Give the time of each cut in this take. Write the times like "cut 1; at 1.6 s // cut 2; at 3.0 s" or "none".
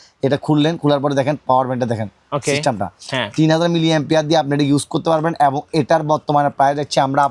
none